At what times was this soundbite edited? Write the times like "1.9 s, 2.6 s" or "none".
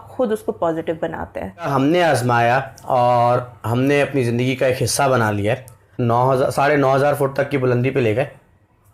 1.7 s, 5.8 s

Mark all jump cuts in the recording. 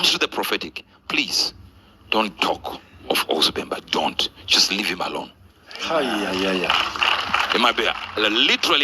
none

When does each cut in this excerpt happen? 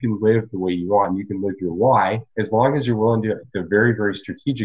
2.3 s

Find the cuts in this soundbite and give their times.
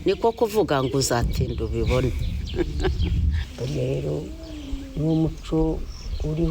3.4 s

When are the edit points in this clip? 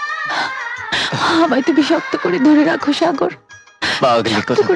none

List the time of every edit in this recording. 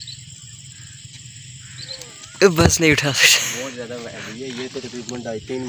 none

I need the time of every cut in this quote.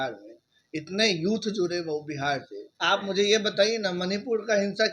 2.7 s

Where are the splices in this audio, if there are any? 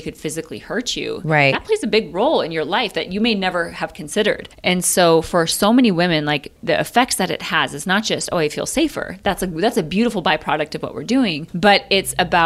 4.5 s, 6.5 s, 11.4 s

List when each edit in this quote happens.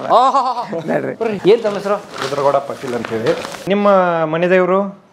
1.4 s, 3.5 s

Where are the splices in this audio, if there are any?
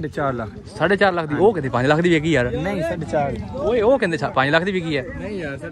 1.3 s

